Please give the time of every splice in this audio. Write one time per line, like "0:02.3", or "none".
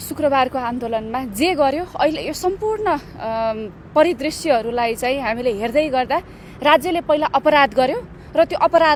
none